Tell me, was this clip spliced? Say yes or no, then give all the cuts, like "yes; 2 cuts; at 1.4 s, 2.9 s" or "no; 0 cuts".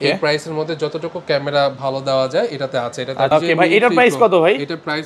yes; 1 cut; at 3.3 s